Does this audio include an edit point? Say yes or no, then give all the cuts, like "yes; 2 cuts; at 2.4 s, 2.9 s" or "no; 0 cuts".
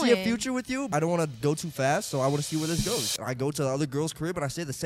yes; 1 cut; at 0.9 s